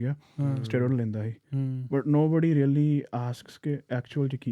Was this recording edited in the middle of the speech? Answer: no; 0 cuts

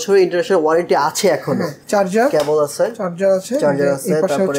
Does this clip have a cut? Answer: yes; 1 cut; at 1.8 s

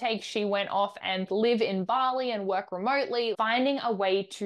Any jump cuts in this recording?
yes; 2 cuts; at 1.3 s, 3.3 s

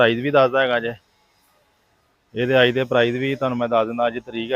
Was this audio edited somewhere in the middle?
no; 0 cuts

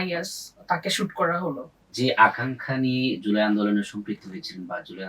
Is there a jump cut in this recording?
yes; 1 cut; at 1.8 s

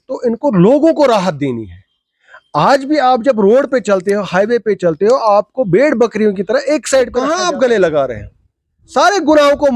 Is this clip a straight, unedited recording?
no; 1 cut; at 7.3 s

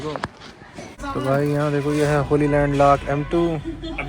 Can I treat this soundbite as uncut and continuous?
no; 1 cut; at 1.0 s

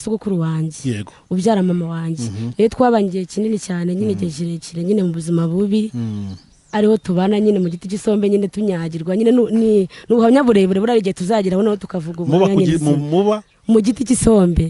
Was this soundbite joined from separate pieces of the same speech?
no; 0 cuts

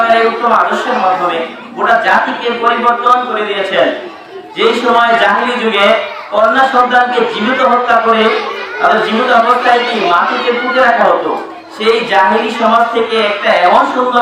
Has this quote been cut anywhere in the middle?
no; 0 cuts

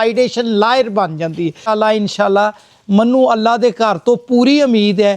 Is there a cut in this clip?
yes; 1 cut; at 1.7 s

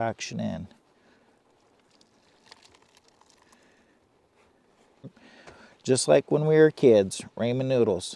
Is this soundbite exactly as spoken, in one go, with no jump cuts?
yes; 0 cuts

